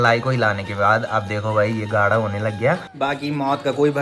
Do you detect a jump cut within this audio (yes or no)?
yes